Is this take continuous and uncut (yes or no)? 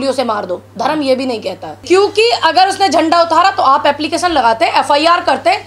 no